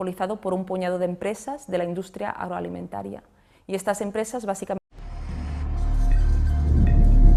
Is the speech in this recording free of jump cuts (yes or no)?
yes